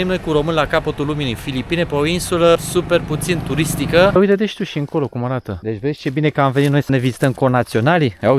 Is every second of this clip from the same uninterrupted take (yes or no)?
no